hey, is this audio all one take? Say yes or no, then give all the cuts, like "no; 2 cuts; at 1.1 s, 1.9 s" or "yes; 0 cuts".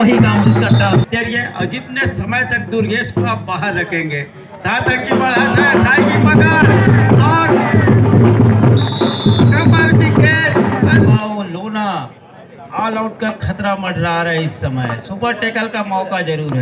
no; 2 cuts; at 1.1 s, 11.0 s